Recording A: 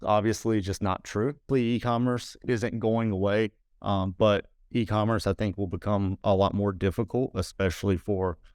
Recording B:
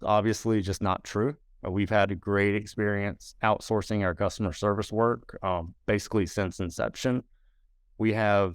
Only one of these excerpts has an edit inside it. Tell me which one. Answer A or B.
A